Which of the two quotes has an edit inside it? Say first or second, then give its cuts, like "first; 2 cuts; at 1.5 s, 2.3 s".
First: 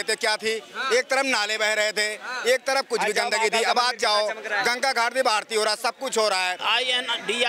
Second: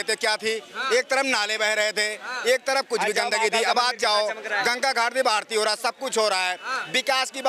first; 1 cut; at 6.6 s